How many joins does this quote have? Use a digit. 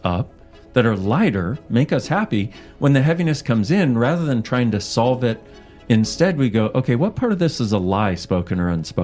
0